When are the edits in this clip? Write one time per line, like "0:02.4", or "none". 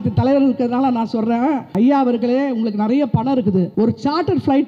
0:01.7
0:03.7